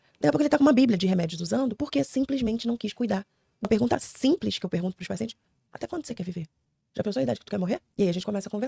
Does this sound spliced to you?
yes; 2 cuts; at 3.6 s, 7.9 s

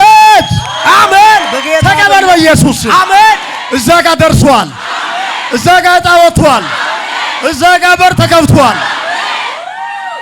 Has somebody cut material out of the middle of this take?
no; 0 cuts

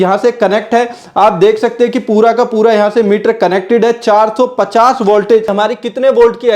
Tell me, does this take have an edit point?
yes; 1 cut; at 5.5 s

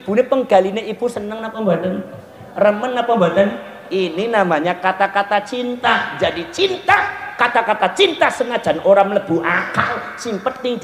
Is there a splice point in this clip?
no; 0 cuts

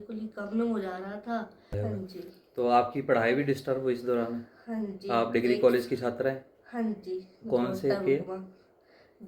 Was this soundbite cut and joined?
yes; 1 cut; at 1.7 s

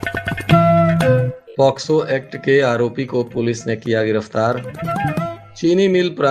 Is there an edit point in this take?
yes; 1 cut; at 1.4 s

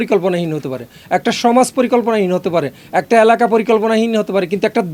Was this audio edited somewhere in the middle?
no; 0 cuts

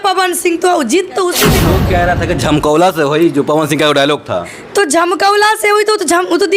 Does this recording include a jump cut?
yes; 1 cut; at 1.6 s

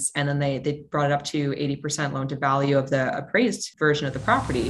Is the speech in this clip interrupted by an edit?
yes; 1 cut; at 3.7 s

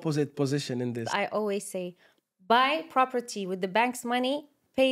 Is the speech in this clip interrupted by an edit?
yes; 1 cut; at 1.1 s

